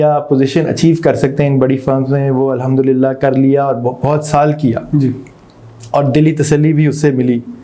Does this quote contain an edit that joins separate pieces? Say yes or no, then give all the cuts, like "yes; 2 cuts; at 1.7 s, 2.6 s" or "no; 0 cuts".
no; 0 cuts